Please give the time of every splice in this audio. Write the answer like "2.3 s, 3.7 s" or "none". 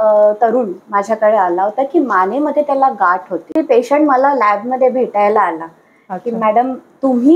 3.5 s